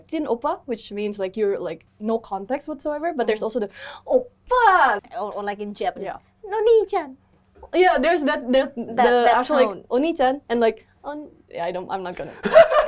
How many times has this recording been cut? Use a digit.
2